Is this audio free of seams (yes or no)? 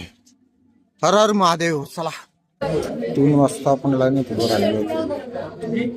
no